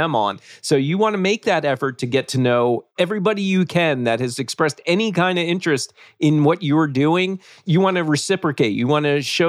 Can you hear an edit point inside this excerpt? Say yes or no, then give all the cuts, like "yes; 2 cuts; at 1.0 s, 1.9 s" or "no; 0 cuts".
yes; 2 cuts; at 2.9 s, 7.6 s